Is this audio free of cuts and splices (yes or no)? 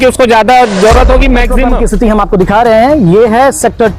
no